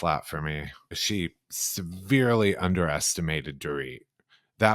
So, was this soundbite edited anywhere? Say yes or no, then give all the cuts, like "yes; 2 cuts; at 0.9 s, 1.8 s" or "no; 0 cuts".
yes; 1 cut; at 1.0 s